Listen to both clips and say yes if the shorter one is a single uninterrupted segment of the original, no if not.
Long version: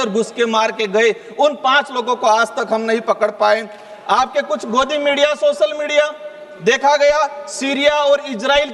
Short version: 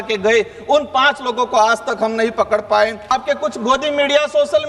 no